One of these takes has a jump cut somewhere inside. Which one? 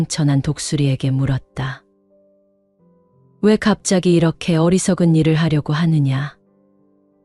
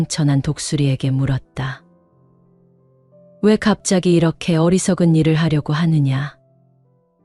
first; 2 cuts; at 1.8 s, 3.4 s

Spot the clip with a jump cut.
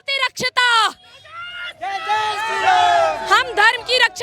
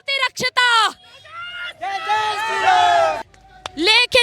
second; 1 cut; at 3.2 s

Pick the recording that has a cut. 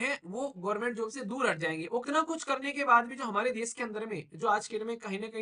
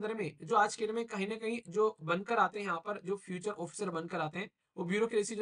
first; 1 cut; at 2.0 s

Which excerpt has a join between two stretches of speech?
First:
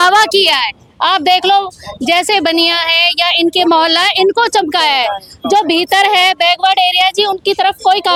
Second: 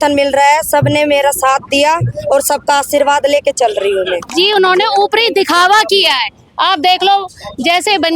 second; 1 cut; at 4.2 s

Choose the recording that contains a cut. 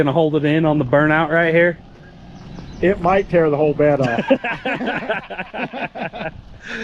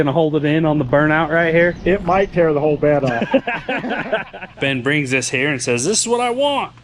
second; 2 cuts; at 1.8 s, 4.4 s

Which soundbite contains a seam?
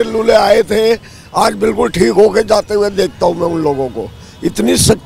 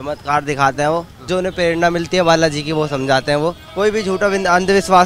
second; 2 cuts; at 1.2 s, 3.6 s

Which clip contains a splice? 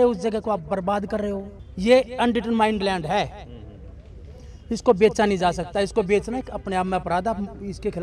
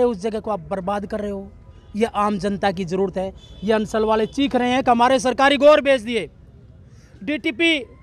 first; 1 cut; at 1.6 s

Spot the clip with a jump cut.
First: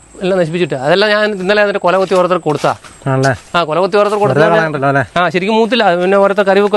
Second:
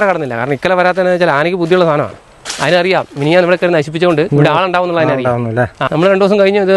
second; 2 cuts; at 4.3 s, 5.8 s

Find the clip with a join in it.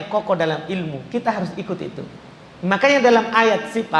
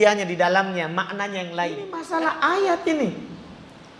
second; 1 cut; at 2.0 s

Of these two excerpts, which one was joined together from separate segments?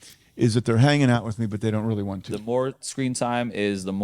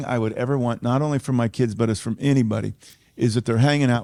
first; 1 cut; at 2.3 s

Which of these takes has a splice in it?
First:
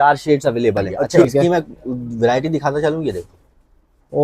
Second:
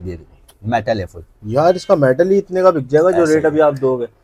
first; 1 cut; at 1.2 s

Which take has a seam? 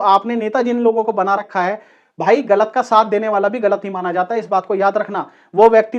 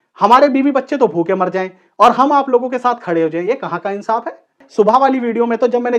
second; 1 cut; at 4.6 s

